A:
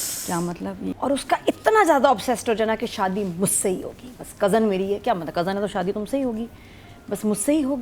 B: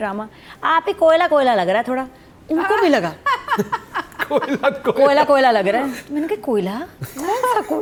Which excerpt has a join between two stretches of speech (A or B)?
A